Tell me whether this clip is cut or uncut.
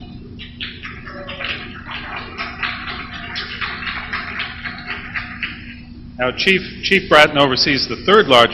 uncut